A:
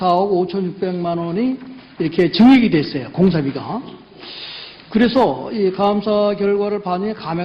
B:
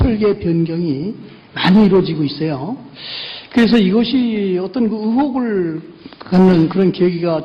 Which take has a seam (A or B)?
A